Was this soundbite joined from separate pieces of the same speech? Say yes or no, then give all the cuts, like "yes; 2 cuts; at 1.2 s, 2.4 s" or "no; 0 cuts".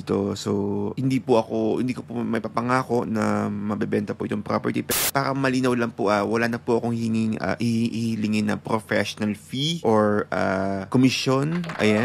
yes; 3 cuts; at 5.0 s, 9.8 s, 10.8 s